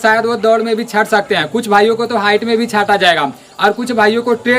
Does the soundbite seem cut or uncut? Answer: uncut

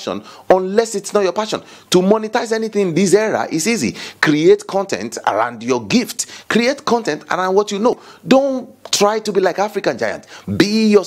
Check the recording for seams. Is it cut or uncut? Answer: uncut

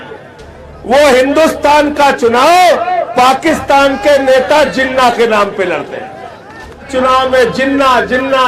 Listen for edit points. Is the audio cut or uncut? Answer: cut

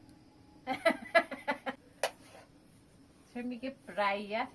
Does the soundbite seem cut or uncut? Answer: cut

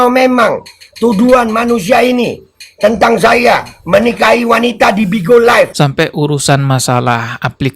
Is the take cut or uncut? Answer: cut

